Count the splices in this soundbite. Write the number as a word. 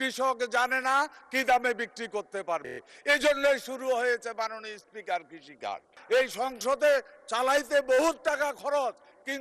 one